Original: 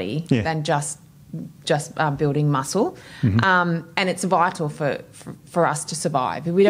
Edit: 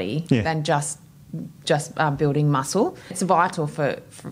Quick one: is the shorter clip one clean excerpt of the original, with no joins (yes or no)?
no